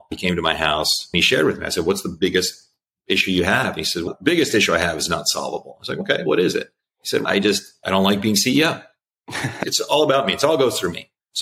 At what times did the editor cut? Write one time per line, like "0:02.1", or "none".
0:01.0
0:09.6